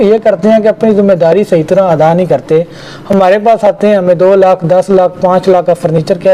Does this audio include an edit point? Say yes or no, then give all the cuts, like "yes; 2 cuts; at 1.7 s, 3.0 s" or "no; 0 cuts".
no; 0 cuts